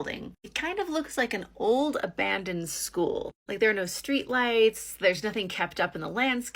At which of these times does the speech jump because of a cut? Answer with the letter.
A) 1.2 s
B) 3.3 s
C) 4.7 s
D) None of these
D